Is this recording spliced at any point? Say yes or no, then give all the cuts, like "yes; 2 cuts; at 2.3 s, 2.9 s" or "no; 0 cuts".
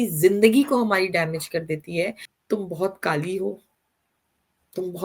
yes; 1 cut; at 2.3 s